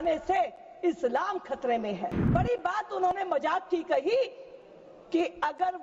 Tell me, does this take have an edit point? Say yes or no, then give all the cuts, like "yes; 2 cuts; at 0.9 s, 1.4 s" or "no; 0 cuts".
yes; 1 cut; at 2.3 s